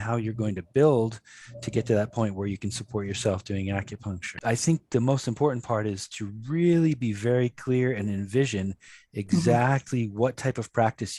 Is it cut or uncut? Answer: cut